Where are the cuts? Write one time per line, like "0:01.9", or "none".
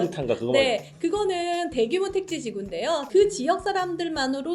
0:03.0